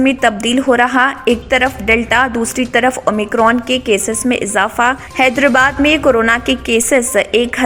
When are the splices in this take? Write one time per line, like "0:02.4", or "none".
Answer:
none